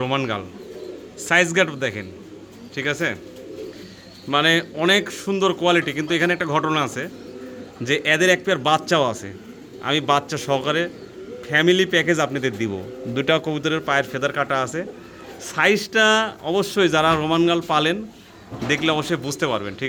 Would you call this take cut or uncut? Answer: uncut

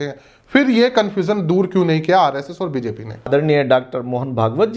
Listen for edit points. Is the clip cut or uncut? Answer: cut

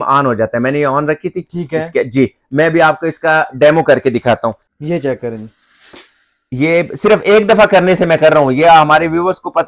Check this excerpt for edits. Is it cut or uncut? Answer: cut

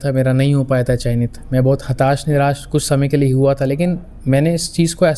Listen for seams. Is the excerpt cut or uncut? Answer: uncut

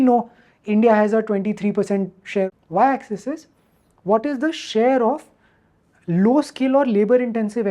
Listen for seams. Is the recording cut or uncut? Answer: cut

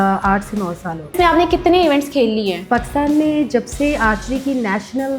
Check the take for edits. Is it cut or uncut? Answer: cut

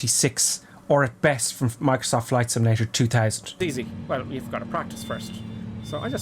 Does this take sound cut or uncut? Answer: cut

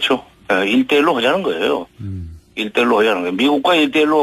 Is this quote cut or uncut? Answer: cut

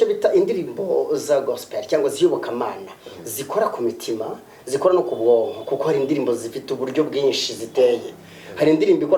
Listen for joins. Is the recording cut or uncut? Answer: uncut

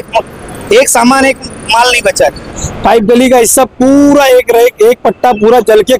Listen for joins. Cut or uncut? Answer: cut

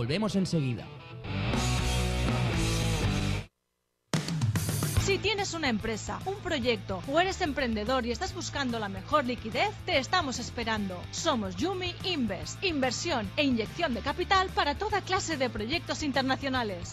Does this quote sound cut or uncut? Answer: uncut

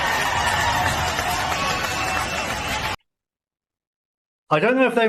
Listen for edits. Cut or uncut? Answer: cut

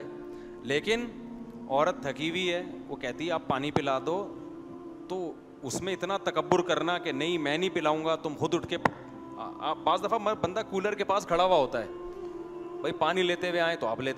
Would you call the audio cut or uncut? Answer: uncut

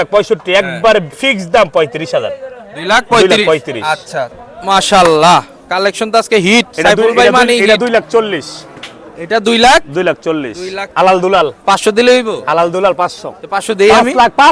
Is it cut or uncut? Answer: cut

